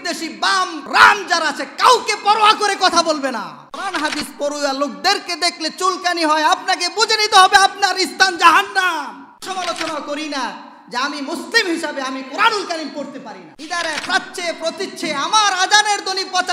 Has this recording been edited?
yes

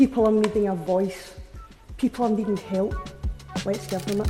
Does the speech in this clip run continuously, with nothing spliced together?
yes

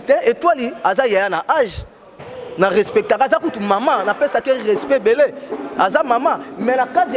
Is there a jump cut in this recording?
no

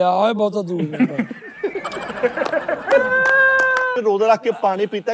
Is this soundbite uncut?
no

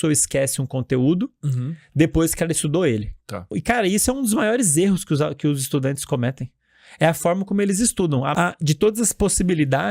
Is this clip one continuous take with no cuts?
no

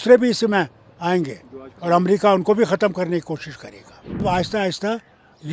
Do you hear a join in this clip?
yes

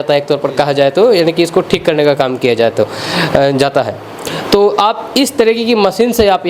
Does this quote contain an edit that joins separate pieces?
no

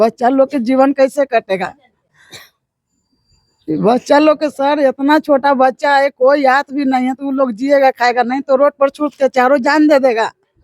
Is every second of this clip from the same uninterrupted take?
yes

